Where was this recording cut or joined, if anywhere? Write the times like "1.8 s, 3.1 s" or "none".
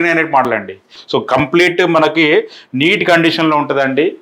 1.0 s